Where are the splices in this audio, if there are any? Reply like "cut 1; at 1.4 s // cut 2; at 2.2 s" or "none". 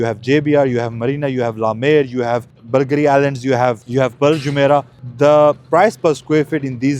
cut 1; at 2.5 s // cut 2; at 3.8 s // cut 3; at 5.0 s

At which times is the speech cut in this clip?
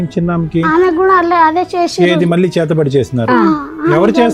none

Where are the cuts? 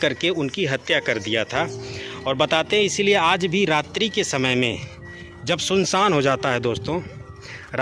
none

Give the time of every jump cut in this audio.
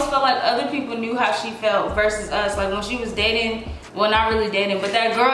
none

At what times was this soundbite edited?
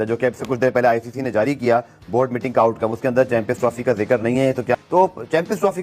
cut 1; at 4.7 s

